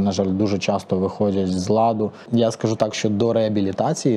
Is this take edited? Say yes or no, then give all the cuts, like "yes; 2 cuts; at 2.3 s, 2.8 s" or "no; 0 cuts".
yes; 1 cut; at 2.2 s